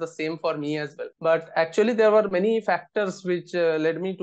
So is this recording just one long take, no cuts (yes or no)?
no